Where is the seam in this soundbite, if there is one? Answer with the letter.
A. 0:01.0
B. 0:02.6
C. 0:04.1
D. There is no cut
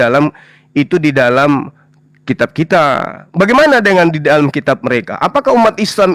D